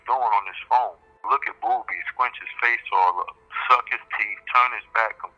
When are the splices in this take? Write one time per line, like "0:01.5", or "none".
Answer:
0:01.2